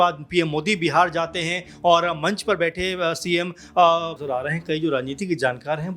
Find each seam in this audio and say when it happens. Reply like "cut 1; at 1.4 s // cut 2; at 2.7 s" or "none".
cut 1; at 4.2 s